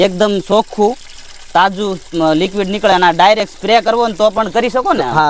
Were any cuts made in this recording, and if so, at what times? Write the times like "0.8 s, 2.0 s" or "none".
none

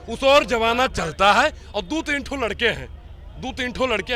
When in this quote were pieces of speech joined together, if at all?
none

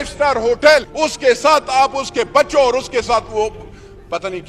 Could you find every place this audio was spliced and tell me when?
0.9 s

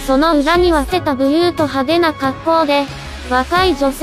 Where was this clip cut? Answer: none

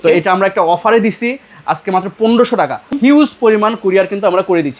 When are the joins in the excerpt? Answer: 2.8 s

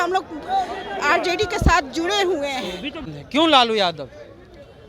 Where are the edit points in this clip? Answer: 3.0 s

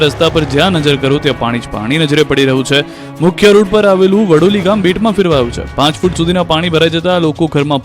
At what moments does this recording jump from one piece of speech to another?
6.7 s

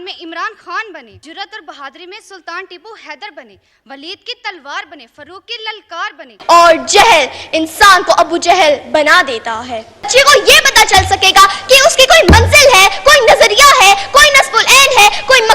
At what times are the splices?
1.2 s, 6.3 s, 10.1 s

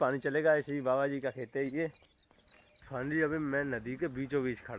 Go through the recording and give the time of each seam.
2.9 s

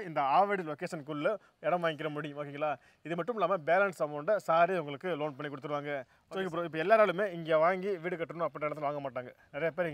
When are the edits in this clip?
6.2 s

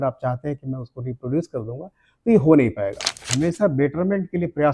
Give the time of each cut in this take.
3.3 s

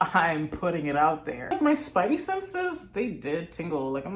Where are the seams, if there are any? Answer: 1.5 s

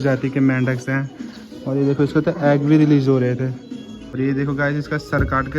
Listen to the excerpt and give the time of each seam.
4.1 s

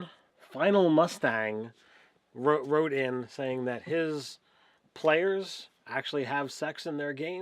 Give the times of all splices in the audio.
5.6 s

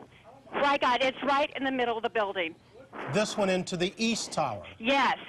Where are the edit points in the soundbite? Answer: 3.0 s

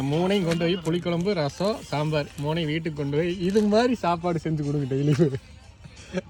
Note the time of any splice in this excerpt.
none

